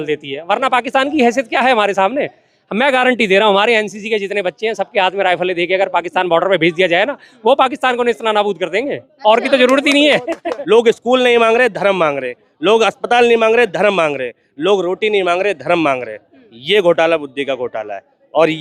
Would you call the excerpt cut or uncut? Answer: cut